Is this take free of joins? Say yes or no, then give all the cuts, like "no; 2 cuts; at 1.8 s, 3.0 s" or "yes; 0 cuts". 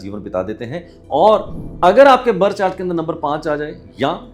no; 1 cut; at 1.6 s